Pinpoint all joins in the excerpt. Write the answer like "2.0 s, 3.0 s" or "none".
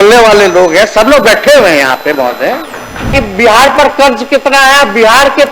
3.1 s